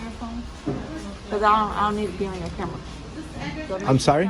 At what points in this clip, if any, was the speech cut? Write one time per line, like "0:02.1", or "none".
none